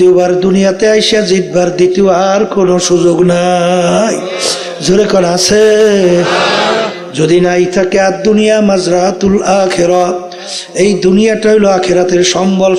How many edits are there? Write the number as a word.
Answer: zero